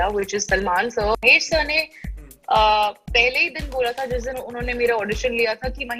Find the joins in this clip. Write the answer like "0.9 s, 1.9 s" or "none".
1.2 s